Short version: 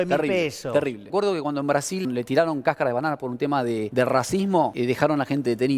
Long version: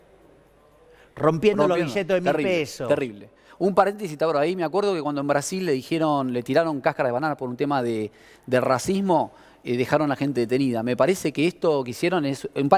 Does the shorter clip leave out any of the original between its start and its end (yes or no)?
yes